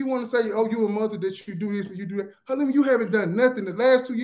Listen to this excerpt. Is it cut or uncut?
uncut